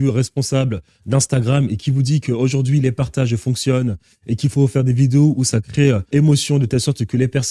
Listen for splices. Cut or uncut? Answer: cut